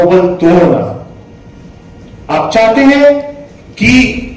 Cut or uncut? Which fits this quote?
uncut